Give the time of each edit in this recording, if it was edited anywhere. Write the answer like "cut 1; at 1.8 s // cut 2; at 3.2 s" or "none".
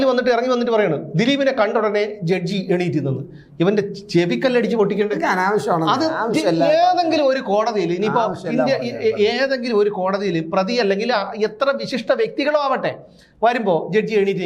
none